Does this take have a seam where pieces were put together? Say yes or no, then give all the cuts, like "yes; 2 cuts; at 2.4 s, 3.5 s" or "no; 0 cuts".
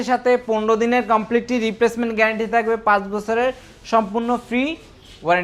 no; 0 cuts